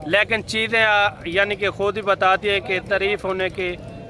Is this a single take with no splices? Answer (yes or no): yes